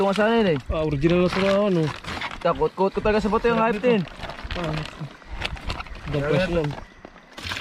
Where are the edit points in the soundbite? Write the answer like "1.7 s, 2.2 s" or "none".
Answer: none

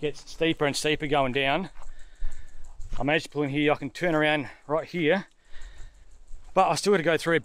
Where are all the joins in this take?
none

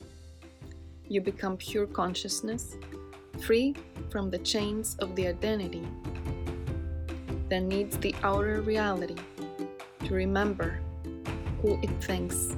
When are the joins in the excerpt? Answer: none

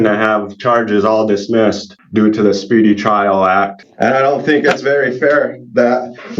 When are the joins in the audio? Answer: 1.9 s, 3.8 s

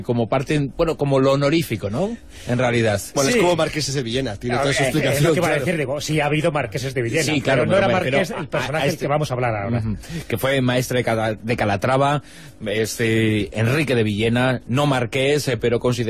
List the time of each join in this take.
7.1 s

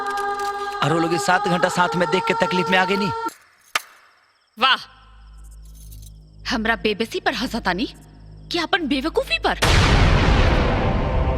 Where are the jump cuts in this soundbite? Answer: 3.3 s

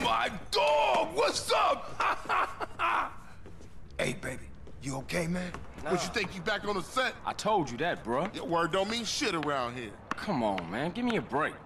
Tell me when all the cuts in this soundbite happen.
5.7 s

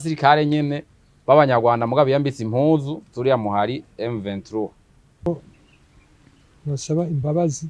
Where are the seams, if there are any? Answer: 5.3 s

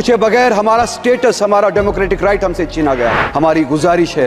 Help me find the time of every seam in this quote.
3.2 s

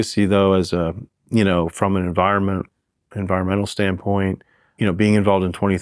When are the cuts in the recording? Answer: 4.6 s

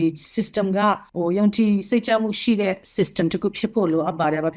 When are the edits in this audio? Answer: none

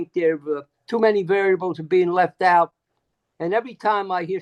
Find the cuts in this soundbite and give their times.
none

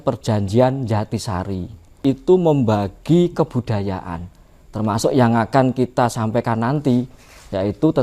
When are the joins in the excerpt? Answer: 2.0 s

